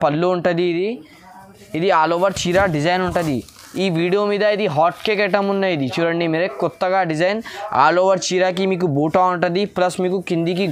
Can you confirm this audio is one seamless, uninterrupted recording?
yes; 0 cuts

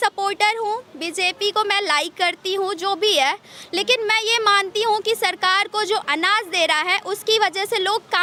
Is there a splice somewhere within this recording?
no; 0 cuts

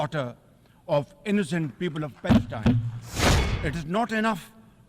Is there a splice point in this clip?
yes; 1 cut; at 3.5 s

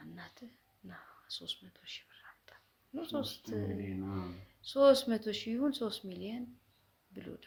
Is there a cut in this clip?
no; 0 cuts

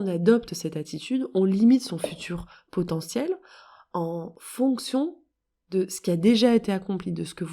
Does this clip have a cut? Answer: yes; 1 cut; at 4.4 s

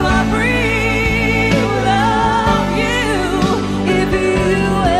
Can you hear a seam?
no; 0 cuts

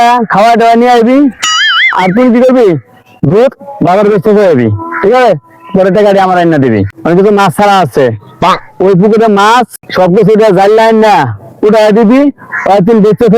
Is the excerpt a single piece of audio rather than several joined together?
no; 2 cuts; at 6.9 s, 9.8 s

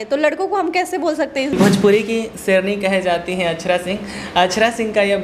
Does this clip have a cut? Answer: yes; 1 cut; at 1.5 s

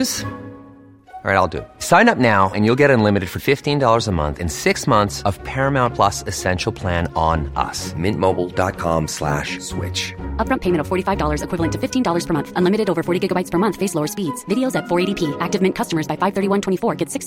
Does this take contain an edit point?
no; 0 cuts

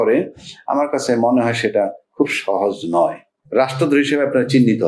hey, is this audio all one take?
no; 1 cut; at 3.3 s

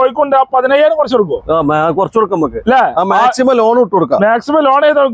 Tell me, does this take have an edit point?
no; 0 cuts

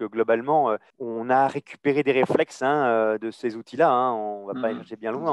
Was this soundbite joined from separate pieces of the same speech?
yes; 1 cut; at 0.9 s

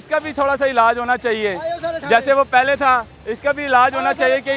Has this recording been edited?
no; 0 cuts

